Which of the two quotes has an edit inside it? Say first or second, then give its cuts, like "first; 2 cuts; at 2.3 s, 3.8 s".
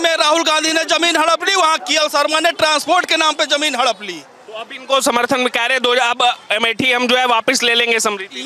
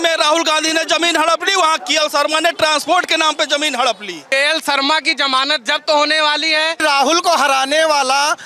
second; 2 cuts; at 4.1 s, 6.8 s